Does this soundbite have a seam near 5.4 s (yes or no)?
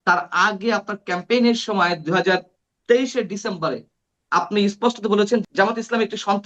yes